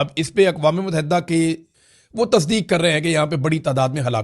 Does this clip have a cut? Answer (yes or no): yes